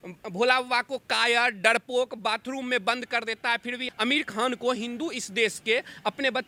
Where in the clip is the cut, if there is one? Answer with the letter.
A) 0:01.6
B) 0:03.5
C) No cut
C